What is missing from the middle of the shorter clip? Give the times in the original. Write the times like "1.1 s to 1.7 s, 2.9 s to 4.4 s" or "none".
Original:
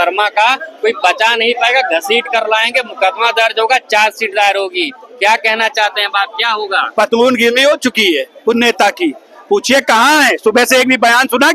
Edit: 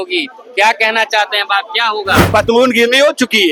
none